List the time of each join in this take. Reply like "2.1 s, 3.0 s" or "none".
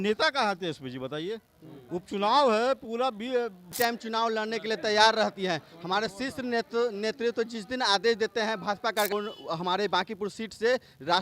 3.7 s, 9.1 s